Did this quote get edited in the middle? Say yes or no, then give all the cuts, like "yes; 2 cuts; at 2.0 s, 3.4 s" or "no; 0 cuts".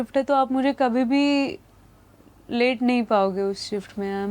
no; 0 cuts